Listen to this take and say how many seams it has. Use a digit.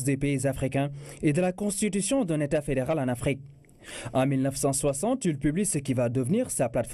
0